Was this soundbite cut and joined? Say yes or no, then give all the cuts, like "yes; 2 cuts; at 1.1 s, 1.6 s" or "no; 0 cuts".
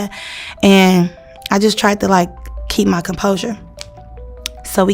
no; 0 cuts